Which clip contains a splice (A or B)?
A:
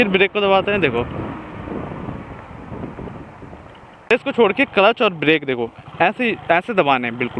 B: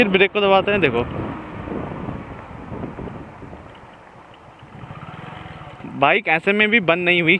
A